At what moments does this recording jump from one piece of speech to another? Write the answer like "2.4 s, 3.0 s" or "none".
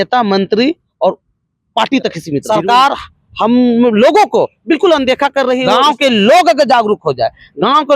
2.4 s, 5.6 s